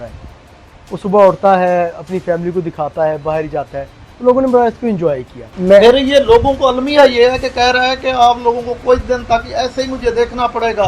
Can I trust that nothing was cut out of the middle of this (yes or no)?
no